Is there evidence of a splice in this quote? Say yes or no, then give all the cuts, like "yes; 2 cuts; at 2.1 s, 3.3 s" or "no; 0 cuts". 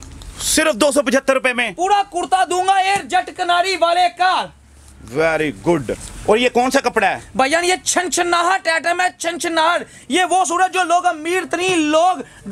no; 0 cuts